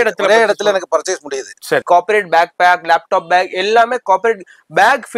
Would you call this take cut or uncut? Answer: cut